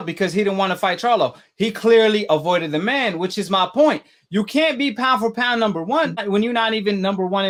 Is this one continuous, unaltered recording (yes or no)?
yes